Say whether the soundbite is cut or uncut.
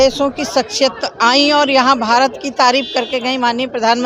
uncut